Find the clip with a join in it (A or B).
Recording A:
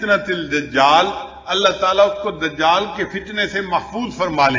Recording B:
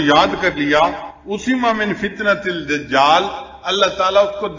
B